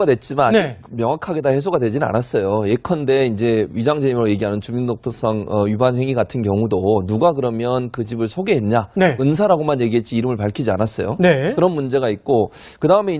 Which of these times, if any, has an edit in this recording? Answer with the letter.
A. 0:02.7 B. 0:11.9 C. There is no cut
C